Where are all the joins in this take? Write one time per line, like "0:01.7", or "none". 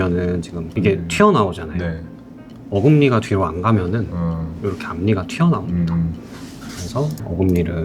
none